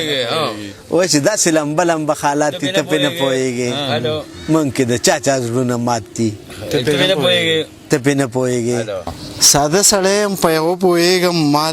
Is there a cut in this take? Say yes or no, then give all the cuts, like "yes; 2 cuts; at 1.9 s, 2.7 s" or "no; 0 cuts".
yes; 1 cut; at 9.1 s